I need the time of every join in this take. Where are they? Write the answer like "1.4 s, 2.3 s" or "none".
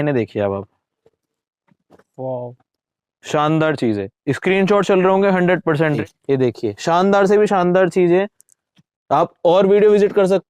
6.0 s